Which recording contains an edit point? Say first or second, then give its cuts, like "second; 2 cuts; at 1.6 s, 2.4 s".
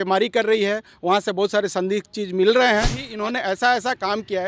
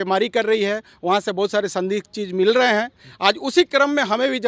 first; 1 cut; at 3.1 s